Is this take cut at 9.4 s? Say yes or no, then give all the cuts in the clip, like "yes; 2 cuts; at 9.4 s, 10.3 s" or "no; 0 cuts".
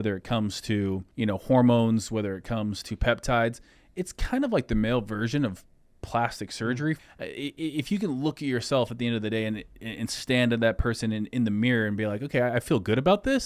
no; 2 cuts; at 1.1 s, 7.0 s